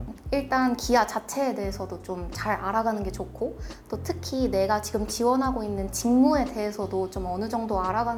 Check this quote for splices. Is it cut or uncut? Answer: uncut